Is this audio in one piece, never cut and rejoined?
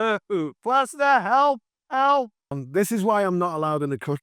no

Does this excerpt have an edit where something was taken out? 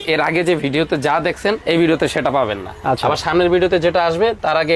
no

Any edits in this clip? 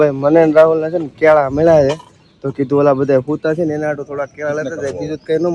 no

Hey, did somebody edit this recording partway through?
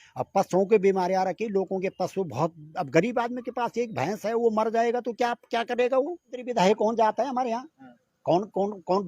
yes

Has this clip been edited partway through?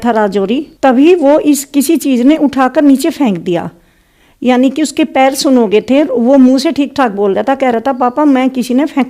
no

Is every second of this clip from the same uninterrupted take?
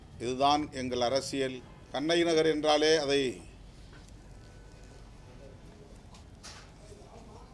no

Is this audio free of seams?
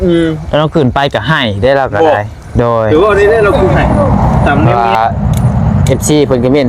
no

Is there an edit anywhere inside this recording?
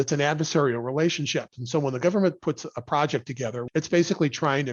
yes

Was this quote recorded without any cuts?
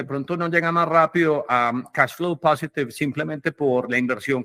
yes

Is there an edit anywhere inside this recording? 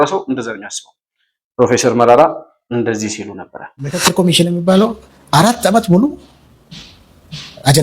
yes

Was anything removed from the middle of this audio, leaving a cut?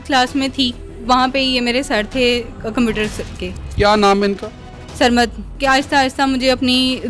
yes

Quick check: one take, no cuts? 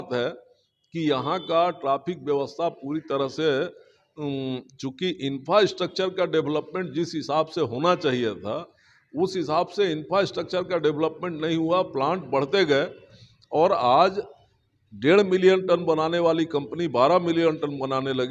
yes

